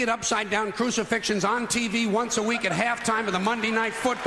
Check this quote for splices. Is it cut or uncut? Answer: uncut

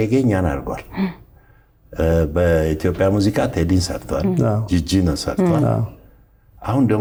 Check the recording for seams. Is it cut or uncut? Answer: uncut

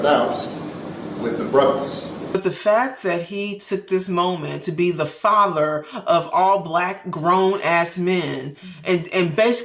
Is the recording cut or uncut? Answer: cut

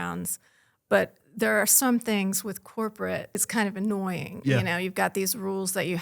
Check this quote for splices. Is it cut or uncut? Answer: cut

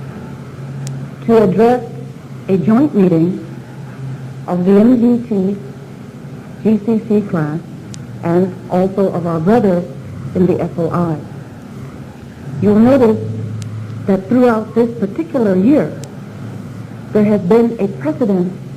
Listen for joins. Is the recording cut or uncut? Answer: cut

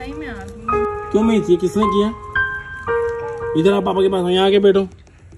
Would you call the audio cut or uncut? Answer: cut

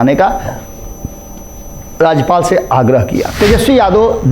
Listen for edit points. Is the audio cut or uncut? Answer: cut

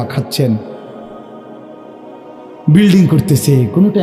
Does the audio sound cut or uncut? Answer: uncut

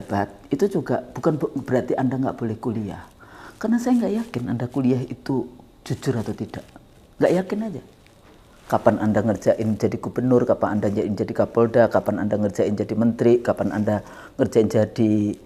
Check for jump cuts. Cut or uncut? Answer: uncut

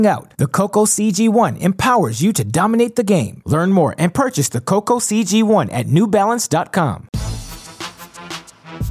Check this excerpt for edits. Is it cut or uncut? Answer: cut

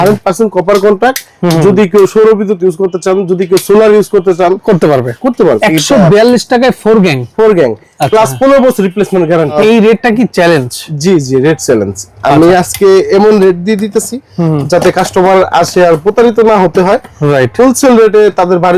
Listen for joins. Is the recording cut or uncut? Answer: cut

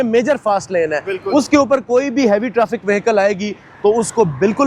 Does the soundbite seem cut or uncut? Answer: uncut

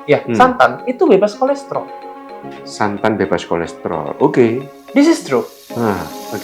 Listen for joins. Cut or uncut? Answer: cut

